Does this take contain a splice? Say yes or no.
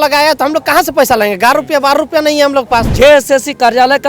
yes